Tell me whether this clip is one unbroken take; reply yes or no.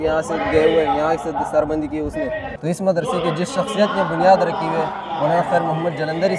no